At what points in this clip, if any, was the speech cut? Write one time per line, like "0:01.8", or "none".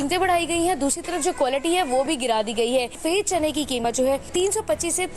0:03.0